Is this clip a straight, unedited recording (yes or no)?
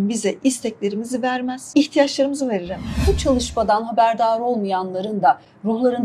no